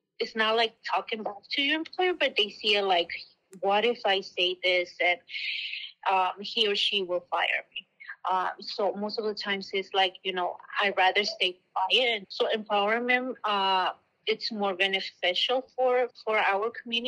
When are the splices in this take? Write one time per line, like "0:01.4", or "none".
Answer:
0:12.2
0:14.1
0:16.1